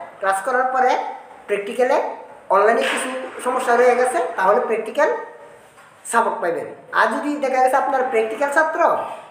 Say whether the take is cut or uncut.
uncut